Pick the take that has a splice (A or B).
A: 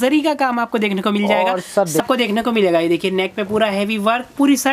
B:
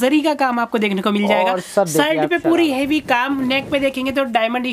A